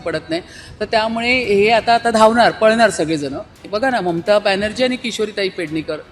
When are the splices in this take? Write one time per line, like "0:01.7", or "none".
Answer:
0:03.6